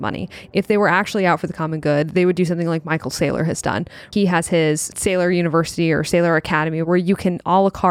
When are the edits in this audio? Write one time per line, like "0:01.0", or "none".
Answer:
0:04.1
0:05.0
0:06.9